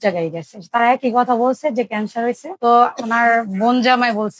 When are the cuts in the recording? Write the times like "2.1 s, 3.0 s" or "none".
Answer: 2.5 s